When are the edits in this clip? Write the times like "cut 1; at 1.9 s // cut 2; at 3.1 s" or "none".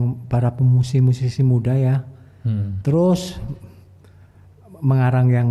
none